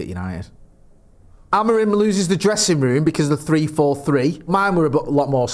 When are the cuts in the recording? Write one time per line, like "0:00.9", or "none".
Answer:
0:01.4
0:04.5